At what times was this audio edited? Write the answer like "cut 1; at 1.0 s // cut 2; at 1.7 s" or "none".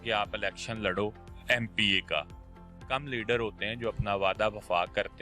cut 1; at 2.8 s